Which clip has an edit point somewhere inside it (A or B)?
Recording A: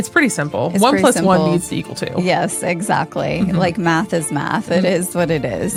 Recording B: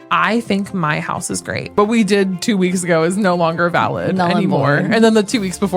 B